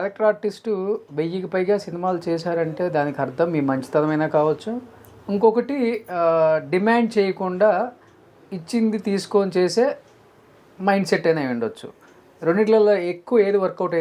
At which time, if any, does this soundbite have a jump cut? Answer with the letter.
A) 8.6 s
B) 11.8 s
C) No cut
C